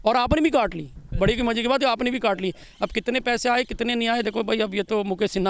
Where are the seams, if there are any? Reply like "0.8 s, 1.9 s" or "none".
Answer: none